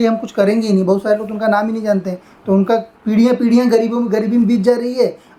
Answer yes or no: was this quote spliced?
no